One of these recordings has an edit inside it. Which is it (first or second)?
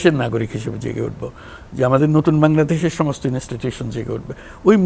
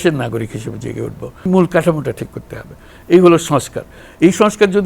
second